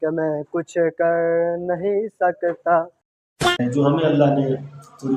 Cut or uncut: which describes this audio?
cut